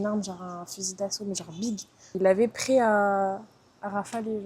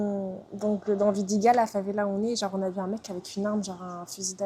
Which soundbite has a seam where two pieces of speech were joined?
first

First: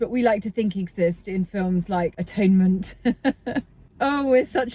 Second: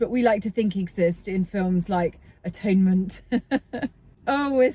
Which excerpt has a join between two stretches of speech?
first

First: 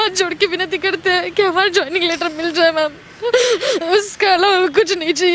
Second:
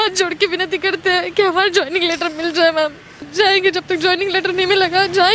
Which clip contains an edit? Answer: second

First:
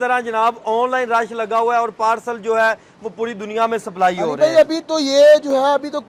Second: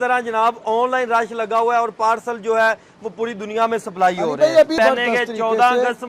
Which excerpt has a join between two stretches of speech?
second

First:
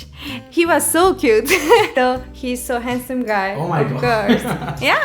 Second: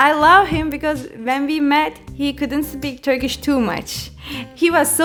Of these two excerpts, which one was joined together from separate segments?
first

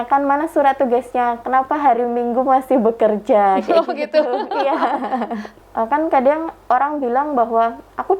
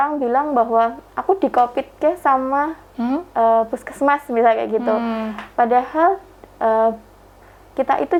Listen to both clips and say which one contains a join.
first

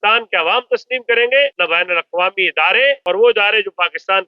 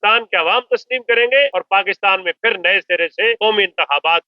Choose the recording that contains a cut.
second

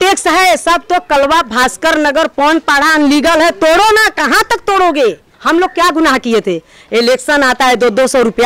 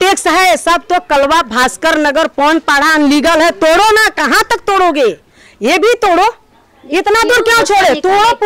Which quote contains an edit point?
first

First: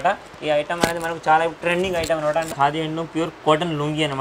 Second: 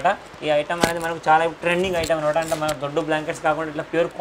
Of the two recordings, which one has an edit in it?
first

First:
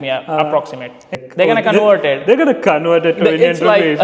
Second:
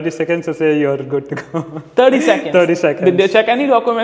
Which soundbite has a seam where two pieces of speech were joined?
first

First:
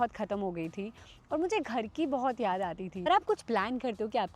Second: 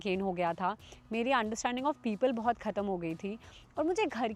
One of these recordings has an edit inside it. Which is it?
first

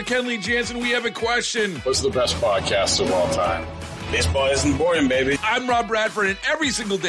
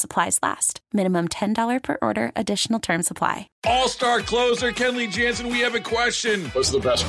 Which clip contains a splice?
second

